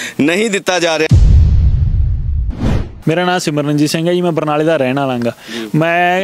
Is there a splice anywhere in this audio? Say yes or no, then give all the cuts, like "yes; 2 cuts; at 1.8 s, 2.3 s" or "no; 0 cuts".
yes; 2 cuts; at 1.1 s, 2.9 s